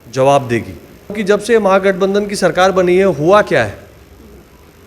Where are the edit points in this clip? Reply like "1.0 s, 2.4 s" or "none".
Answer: 1.2 s